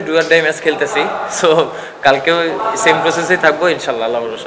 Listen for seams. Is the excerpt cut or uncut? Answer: uncut